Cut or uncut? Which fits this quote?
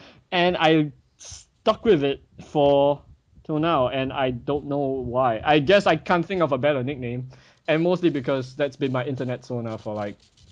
cut